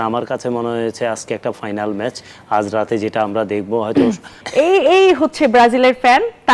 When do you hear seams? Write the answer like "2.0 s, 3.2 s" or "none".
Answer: 4.3 s